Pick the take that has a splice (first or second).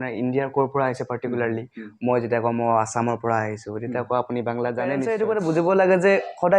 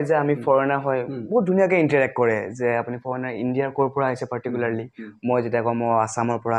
first